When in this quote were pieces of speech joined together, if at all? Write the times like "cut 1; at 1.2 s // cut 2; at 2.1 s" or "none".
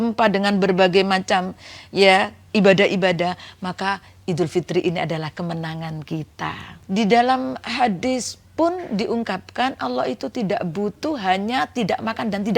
cut 1; at 6.7 s